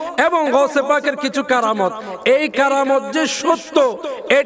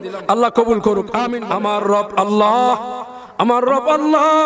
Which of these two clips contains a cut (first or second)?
second